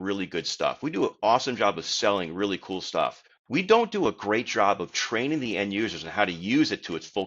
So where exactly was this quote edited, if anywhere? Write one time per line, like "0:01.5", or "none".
0:03.3